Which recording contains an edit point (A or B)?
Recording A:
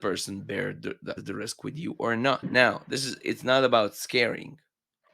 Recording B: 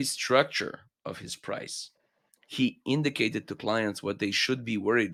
A